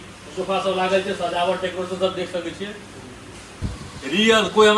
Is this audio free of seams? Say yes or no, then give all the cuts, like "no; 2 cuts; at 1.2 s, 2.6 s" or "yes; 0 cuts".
no; 1 cut; at 3.6 s